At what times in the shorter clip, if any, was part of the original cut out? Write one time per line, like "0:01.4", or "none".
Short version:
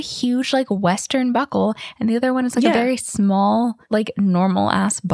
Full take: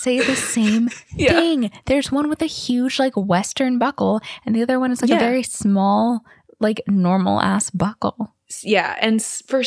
0:03.8